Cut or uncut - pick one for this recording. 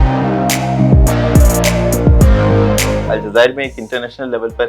cut